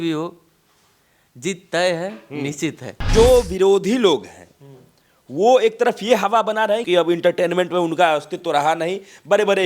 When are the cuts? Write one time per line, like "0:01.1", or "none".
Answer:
0:03.1
0:06.8